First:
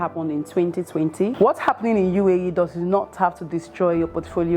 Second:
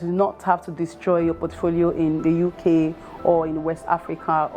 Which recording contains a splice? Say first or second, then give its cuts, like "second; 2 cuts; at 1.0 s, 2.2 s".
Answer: first; 1 cut; at 1.3 s